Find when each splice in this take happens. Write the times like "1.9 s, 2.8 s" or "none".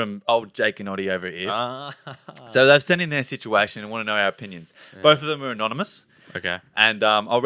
none